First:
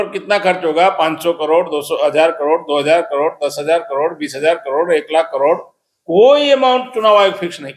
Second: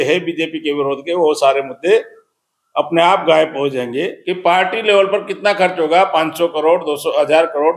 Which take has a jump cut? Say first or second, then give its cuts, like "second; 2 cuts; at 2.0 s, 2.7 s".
second; 1 cut; at 4.2 s